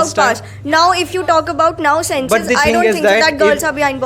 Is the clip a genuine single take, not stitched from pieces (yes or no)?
yes